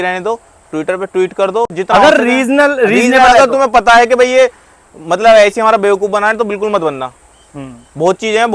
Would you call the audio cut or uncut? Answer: uncut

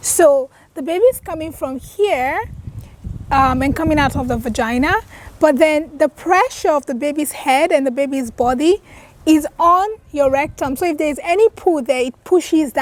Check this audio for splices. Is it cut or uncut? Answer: uncut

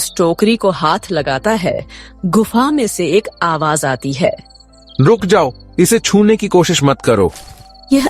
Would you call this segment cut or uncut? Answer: uncut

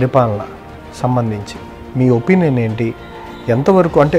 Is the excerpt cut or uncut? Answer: uncut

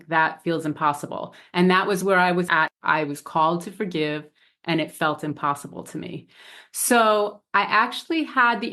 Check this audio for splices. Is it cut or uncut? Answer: cut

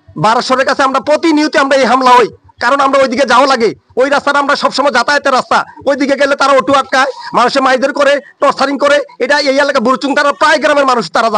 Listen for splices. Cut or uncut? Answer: uncut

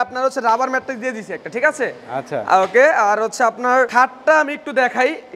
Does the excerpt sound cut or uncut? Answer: uncut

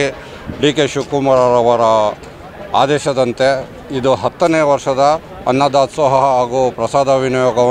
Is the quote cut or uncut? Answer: uncut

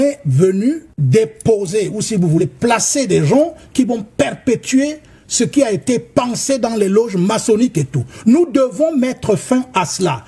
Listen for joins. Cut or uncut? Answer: cut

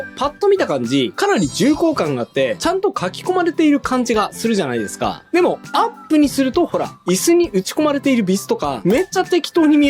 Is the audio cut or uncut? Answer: cut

